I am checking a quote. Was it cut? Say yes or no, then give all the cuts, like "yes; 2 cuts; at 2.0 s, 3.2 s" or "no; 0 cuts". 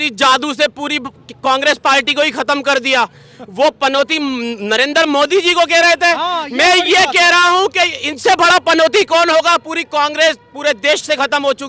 no; 0 cuts